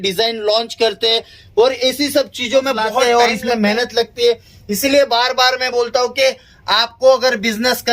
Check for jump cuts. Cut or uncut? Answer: cut